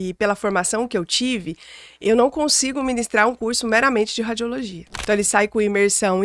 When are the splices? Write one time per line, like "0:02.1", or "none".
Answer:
0:04.9